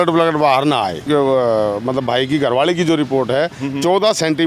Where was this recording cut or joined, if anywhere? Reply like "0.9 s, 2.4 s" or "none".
1.0 s